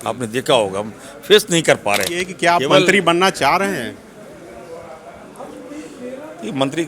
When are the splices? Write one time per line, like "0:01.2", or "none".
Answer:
0:02.2